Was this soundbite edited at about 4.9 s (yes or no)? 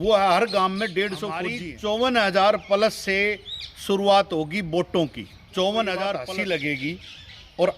no